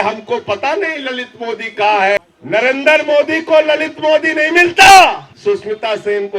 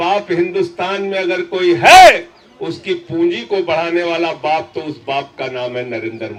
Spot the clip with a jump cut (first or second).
first